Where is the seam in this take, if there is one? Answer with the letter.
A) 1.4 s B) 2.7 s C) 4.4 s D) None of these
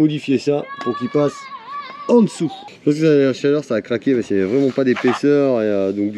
B